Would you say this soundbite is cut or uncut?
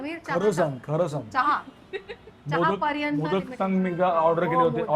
uncut